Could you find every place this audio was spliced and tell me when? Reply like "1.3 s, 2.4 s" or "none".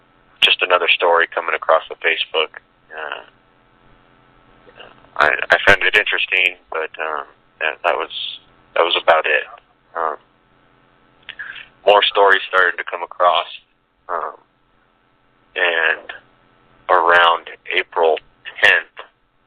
12.3 s